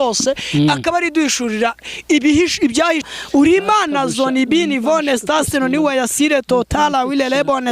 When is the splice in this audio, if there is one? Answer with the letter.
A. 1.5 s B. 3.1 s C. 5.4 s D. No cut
B